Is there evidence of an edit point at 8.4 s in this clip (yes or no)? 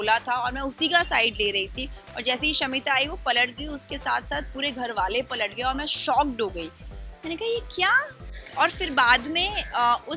no